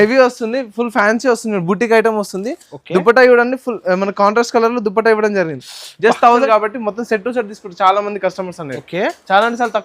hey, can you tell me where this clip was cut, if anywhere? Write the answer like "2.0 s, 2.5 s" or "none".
6.5 s